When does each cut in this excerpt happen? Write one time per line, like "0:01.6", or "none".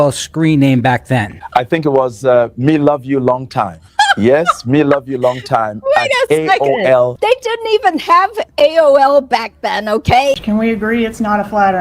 0:07.1
0:10.4